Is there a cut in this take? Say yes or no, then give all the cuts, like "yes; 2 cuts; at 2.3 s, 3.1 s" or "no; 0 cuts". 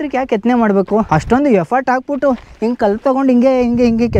yes; 1 cut; at 1.1 s